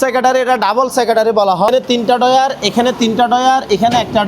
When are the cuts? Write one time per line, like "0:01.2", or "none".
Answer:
0:01.7